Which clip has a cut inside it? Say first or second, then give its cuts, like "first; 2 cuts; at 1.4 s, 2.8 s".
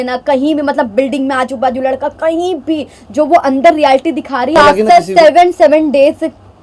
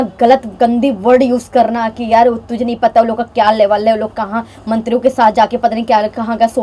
first; 1 cut; at 4.5 s